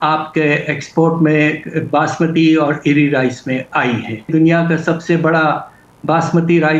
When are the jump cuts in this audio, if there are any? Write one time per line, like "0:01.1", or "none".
0:04.3